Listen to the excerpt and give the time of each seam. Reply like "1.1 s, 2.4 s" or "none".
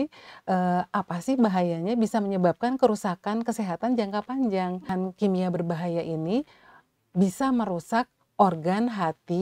4.9 s